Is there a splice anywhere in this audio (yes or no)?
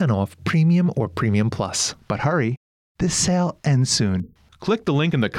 yes